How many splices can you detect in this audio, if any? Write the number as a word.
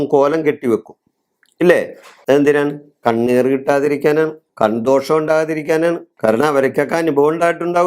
two